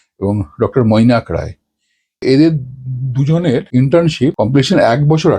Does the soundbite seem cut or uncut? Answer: cut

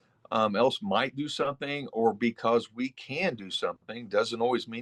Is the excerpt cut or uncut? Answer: uncut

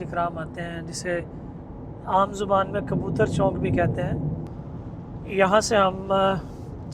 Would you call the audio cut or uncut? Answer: cut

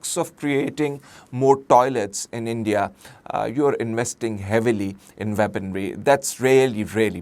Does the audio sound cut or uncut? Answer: uncut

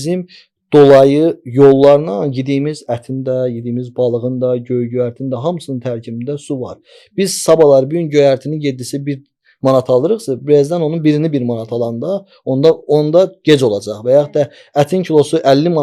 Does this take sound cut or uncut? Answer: uncut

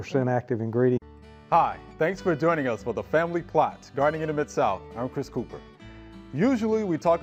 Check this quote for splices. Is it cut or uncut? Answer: uncut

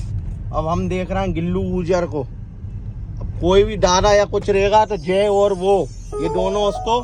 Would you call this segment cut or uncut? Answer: uncut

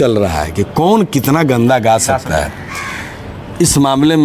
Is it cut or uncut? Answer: uncut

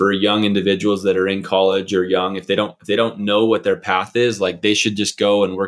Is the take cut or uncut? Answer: uncut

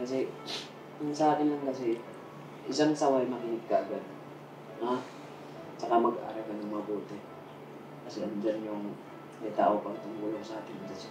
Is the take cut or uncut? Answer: uncut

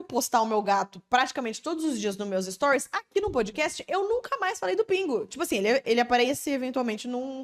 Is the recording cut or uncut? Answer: uncut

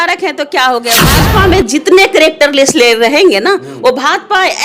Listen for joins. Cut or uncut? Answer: cut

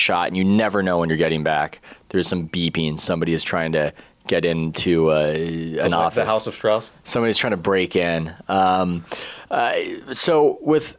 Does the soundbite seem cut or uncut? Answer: uncut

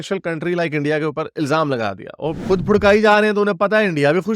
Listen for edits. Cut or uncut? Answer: cut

